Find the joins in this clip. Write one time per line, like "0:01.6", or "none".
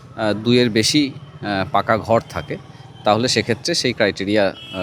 none